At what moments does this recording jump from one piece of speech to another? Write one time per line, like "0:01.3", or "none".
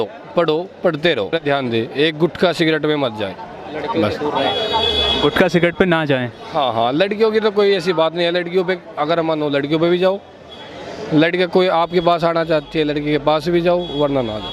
0:01.4